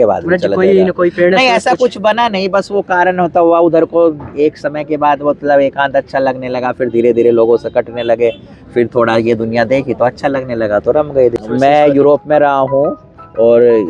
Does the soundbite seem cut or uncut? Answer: cut